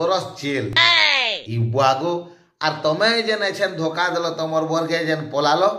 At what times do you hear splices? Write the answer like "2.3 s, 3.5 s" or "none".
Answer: none